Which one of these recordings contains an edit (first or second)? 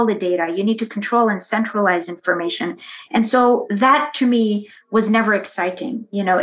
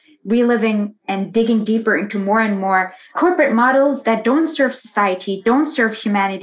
second